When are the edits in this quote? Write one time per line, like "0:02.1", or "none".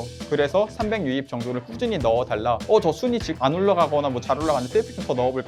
0:02.6
0:03.3